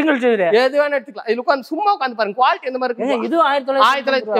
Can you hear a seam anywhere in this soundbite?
no; 0 cuts

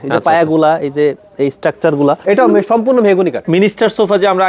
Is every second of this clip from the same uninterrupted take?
no; 2 cuts; at 2.2 s, 3.4 s

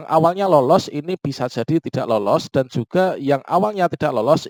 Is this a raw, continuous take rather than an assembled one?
yes; 0 cuts

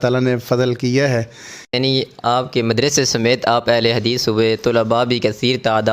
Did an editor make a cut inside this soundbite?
yes; 1 cut; at 1.8 s

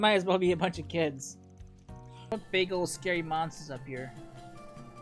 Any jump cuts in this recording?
yes; 1 cut; at 2.3 s

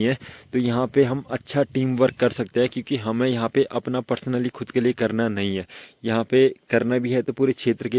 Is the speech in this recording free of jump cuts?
yes; 0 cuts

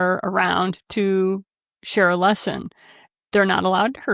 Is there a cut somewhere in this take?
no; 0 cuts

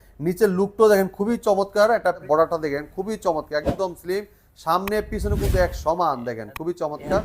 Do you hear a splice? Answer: yes; 1 cut; at 2.2 s

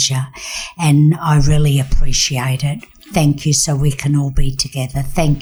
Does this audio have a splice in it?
no; 0 cuts

